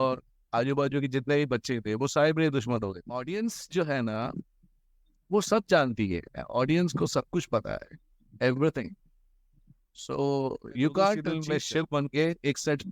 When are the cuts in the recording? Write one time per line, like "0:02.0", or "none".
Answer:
0:03.1
0:11.4